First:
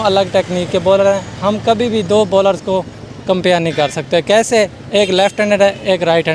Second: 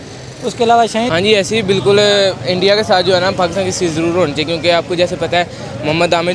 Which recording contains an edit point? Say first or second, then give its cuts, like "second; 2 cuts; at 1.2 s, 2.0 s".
second; 1 cut; at 1.1 s